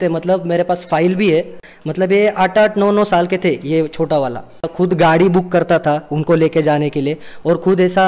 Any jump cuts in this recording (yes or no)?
yes